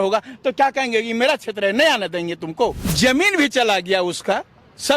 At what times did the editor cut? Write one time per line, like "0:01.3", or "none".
0:02.8